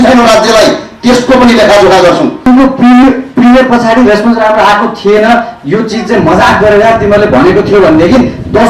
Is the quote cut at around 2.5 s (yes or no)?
yes